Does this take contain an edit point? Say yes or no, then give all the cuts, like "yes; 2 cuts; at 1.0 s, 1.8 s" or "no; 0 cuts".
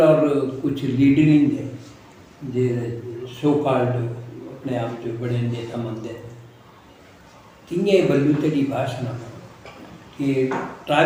no; 0 cuts